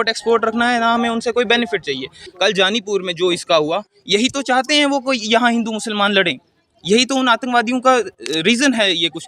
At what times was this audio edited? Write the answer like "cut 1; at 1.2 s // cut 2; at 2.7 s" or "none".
cut 1; at 2.2 s